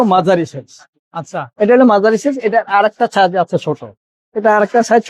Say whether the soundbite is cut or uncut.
uncut